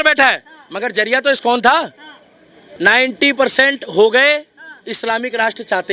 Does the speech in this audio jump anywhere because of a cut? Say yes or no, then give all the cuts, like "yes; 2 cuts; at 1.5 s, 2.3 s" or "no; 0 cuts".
yes; 1 cut; at 2.7 s